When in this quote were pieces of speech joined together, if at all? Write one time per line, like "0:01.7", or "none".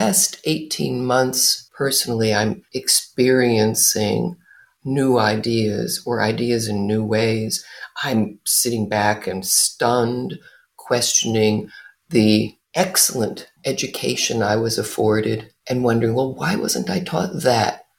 0:01.6